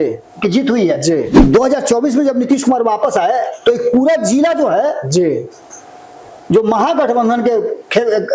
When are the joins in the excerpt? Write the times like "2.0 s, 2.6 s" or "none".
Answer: 1.3 s